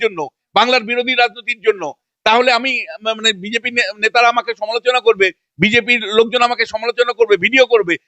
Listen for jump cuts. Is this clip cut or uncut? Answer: uncut